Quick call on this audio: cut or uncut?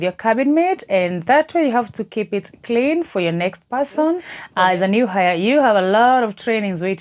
cut